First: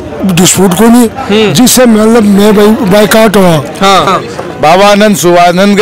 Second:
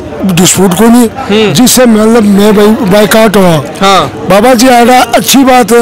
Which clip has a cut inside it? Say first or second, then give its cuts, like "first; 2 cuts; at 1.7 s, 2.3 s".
first; 1 cut; at 4.1 s